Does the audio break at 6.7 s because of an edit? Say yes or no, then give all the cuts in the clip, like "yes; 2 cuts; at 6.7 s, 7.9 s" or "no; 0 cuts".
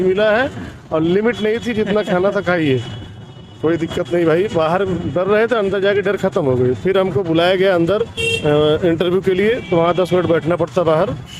no; 0 cuts